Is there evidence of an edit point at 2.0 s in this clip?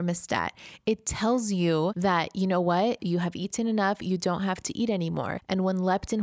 yes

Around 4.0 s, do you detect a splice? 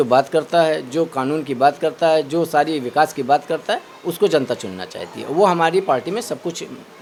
no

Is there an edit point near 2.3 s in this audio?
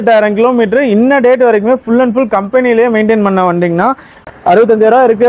no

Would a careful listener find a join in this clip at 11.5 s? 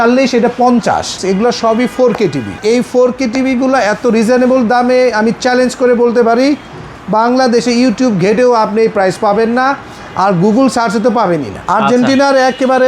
yes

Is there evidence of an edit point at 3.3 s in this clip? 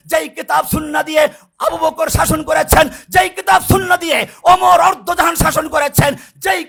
no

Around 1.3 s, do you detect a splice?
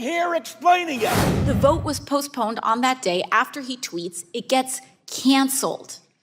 yes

